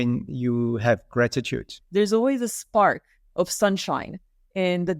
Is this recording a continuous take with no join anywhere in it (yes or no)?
no